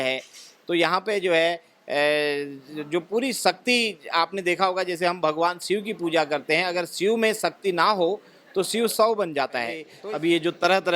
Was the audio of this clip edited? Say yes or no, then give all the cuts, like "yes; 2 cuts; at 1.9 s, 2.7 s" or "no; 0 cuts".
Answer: yes; 1 cut; at 9.9 s